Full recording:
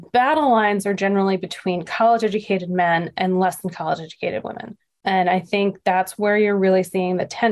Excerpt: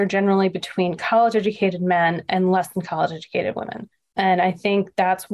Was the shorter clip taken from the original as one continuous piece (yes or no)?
yes